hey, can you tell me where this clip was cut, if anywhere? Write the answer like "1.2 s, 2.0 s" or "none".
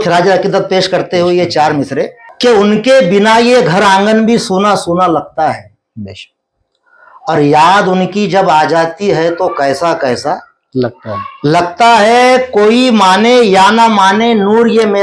2.2 s